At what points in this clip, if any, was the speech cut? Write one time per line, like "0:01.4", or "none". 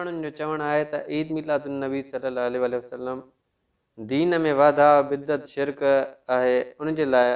none